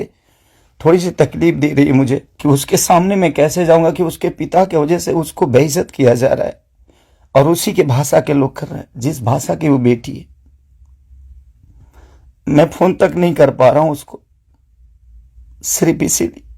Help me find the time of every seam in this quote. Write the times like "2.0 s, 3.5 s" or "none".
2.3 s